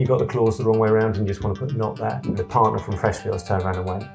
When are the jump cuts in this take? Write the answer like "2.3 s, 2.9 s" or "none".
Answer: 2.2 s